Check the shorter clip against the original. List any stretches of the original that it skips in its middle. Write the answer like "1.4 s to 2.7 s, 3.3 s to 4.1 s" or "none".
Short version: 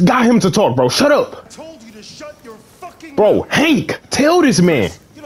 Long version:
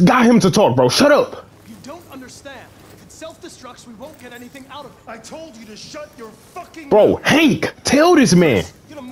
1.5 s to 5.2 s